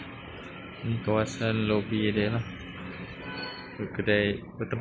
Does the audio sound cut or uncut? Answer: uncut